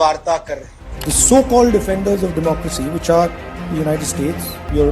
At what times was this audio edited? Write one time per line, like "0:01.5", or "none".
0:00.9